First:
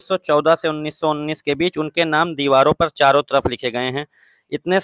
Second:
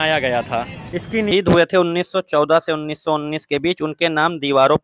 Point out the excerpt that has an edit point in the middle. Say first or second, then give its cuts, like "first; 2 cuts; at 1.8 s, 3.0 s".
second; 1 cut; at 1.1 s